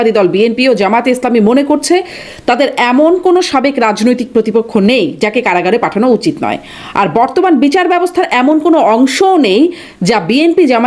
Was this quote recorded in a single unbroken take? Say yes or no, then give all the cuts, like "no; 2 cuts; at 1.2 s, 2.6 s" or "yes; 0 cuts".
yes; 0 cuts